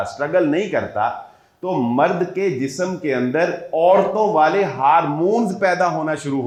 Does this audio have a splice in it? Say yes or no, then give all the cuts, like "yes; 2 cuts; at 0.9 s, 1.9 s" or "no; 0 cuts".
no; 0 cuts